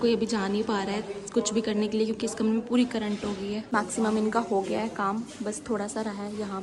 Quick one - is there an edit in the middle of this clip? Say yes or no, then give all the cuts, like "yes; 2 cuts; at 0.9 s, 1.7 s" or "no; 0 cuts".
no; 0 cuts